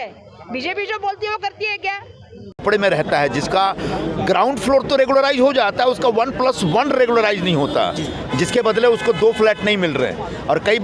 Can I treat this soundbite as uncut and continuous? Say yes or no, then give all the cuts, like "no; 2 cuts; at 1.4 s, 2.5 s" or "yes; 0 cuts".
no; 1 cut; at 2.6 s